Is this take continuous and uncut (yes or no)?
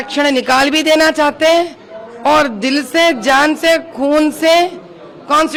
yes